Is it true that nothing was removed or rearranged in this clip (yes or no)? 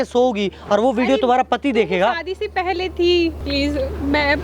no